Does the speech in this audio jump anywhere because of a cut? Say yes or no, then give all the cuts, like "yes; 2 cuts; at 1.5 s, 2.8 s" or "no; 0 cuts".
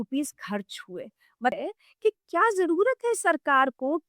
yes; 1 cut; at 1.6 s